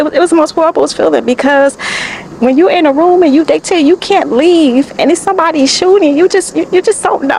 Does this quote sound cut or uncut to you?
uncut